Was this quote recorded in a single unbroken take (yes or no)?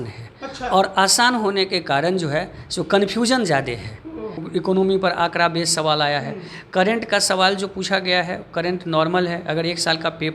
no